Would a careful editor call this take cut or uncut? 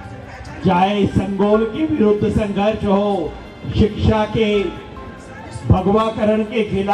uncut